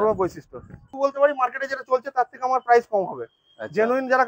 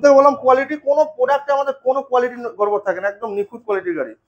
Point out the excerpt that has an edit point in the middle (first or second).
first